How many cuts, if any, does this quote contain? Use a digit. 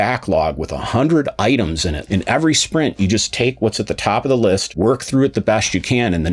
2